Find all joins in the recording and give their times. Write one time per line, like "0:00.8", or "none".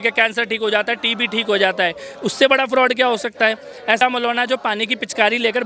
none